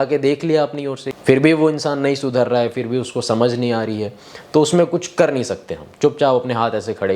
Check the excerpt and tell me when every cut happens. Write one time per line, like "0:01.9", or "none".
0:01.0